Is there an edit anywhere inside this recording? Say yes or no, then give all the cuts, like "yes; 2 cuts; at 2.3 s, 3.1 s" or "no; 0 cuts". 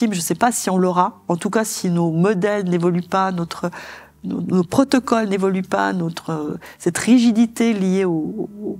no; 0 cuts